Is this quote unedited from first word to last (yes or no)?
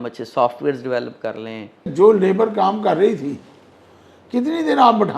no